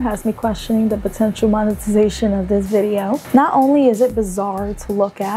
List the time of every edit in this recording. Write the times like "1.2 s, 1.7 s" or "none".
none

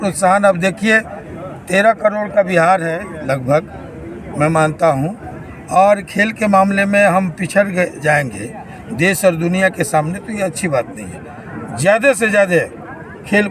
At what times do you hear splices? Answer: none

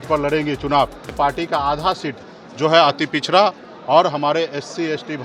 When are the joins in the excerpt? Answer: 1.1 s

